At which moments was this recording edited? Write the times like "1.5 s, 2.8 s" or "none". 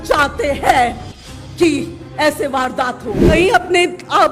3.3 s